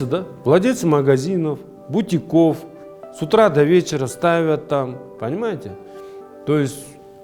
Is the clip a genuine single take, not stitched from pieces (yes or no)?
yes